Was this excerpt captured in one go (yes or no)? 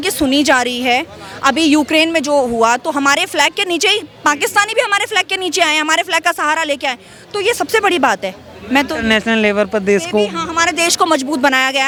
yes